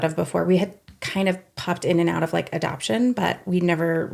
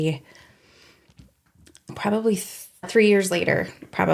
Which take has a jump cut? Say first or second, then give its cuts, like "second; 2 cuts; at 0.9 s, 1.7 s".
second; 2 cuts; at 1.9 s, 2.9 s